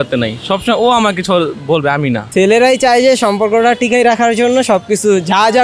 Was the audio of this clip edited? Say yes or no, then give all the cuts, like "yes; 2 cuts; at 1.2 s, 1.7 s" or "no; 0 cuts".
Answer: yes; 1 cut; at 2.3 s